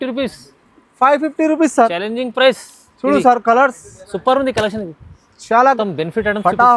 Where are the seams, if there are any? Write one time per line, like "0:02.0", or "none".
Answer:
0:05.8